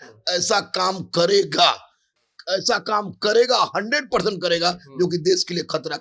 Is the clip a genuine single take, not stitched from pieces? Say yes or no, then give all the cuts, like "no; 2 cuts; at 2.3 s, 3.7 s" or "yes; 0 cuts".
yes; 0 cuts